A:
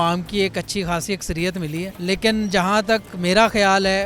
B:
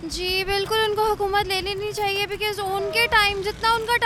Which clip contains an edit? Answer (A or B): A